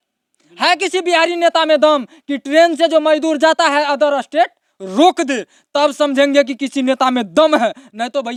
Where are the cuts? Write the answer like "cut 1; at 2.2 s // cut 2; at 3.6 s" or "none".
none